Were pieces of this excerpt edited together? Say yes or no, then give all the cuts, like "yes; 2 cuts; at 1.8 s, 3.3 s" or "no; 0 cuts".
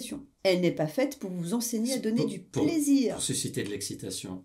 no; 0 cuts